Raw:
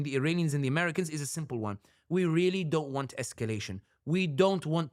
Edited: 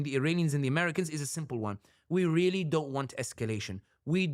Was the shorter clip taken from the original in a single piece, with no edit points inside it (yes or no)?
yes